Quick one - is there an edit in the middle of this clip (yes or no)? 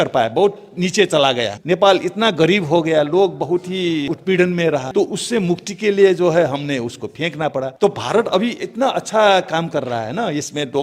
yes